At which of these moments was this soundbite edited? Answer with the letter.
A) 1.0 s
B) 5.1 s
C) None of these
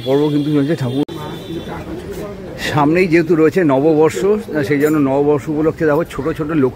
A